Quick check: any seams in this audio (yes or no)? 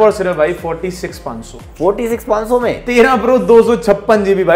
no